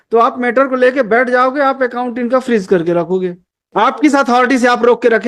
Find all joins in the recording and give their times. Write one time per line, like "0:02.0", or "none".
0:03.7